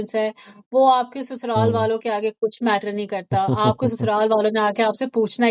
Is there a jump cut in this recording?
no; 0 cuts

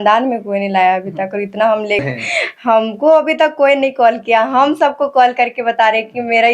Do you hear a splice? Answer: yes; 1 cut; at 2.0 s

